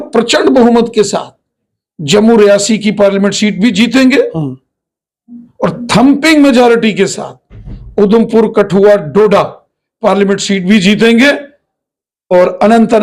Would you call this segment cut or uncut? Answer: uncut